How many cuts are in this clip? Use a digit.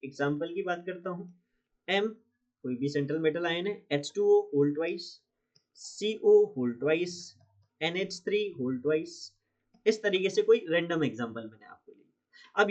0